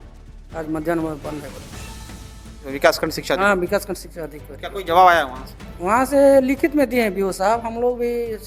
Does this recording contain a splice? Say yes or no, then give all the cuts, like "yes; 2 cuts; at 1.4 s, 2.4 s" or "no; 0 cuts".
no; 0 cuts